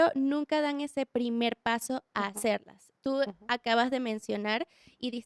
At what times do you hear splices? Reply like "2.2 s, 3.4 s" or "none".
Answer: none